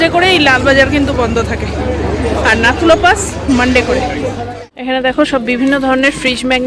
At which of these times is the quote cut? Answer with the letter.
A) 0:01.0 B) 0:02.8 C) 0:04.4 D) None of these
C